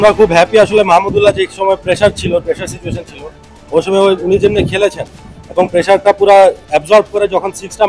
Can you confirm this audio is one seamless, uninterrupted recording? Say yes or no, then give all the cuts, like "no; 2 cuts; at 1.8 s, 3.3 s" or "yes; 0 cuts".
yes; 0 cuts